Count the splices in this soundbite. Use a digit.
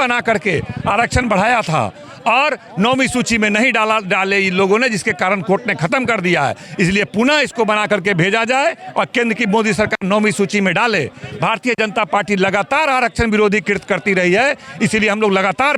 0